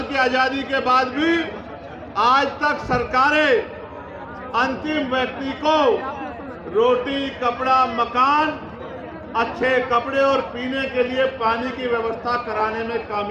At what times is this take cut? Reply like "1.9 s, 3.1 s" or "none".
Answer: none